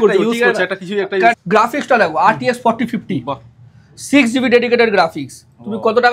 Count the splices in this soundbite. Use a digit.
1